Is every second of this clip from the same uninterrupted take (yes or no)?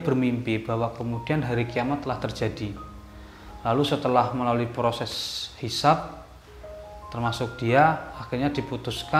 yes